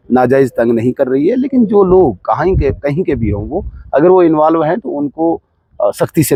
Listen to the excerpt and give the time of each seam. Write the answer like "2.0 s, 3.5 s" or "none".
none